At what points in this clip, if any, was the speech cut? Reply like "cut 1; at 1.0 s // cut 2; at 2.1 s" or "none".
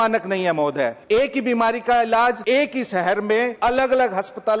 cut 1; at 1.0 s // cut 2; at 2.4 s // cut 3; at 3.5 s

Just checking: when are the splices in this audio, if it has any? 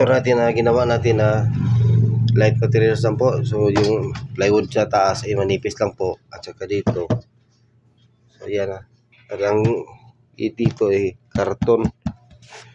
none

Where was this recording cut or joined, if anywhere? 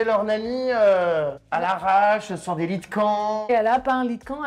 cut 1; at 1.4 s // cut 2; at 3.5 s

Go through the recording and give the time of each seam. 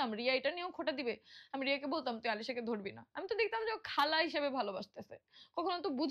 none

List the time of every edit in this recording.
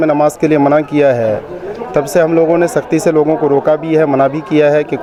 none

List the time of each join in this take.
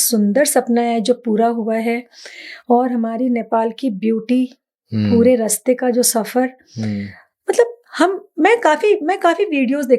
none

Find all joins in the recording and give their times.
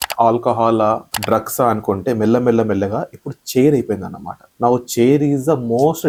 none

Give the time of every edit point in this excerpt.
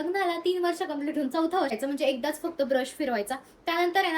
cut 1; at 1.7 s

